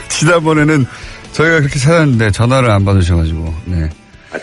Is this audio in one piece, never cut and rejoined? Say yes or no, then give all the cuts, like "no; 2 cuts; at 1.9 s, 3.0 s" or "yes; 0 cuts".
yes; 0 cuts